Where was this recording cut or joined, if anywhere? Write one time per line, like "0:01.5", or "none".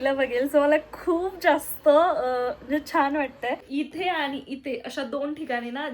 0:03.6